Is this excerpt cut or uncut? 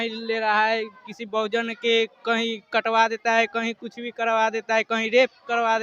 uncut